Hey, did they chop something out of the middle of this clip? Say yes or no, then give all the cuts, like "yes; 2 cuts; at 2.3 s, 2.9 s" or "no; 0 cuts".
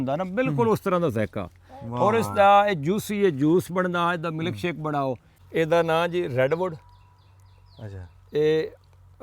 yes; 1 cut; at 5.3 s